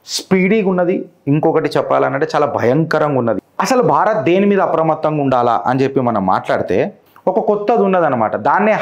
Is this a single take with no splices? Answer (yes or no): no